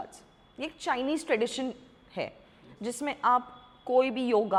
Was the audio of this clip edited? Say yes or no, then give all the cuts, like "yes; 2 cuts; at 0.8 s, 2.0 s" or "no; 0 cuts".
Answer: no; 0 cuts